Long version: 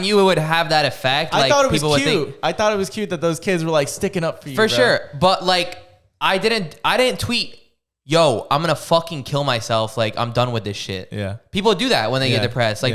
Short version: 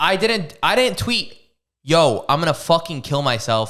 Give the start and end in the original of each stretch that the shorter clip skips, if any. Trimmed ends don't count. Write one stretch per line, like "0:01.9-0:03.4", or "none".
none